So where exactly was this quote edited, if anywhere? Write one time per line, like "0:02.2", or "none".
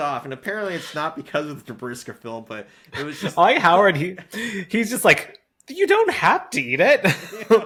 none